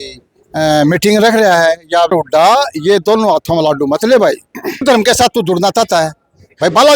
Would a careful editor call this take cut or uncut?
cut